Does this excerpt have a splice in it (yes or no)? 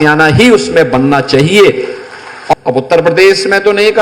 yes